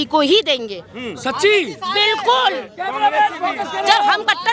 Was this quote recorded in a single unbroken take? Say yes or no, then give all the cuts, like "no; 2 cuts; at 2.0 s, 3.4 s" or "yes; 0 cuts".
yes; 0 cuts